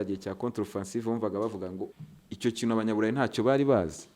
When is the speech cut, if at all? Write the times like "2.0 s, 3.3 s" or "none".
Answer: 1.9 s

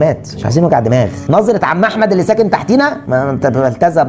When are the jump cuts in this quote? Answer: 1.2 s

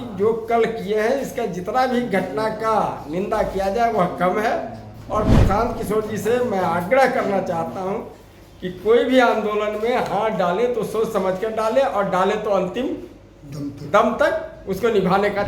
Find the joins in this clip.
none

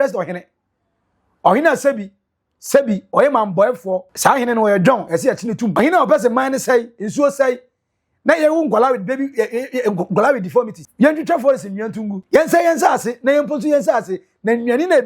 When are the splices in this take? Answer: 4.1 s, 5.8 s, 10.8 s, 12.1 s

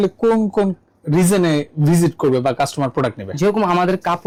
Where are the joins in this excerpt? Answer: none

